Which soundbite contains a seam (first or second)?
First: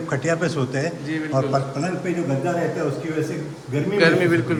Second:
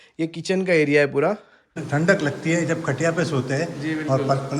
second